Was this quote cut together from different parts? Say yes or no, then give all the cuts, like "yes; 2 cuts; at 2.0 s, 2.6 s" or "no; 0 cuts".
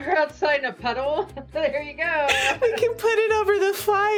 no; 0 cuts